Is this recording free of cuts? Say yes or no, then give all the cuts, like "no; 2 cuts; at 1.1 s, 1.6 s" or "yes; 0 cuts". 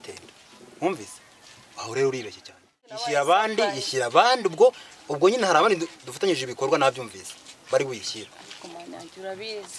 no; 1 cut; at 3.0 s